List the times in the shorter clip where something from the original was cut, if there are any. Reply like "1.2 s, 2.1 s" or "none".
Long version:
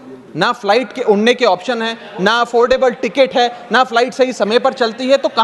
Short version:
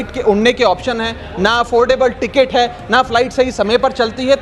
none